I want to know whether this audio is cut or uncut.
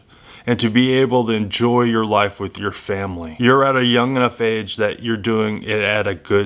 cut